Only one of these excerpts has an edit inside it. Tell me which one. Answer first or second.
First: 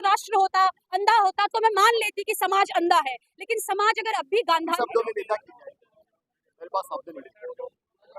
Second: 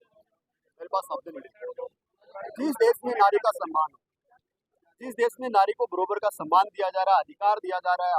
first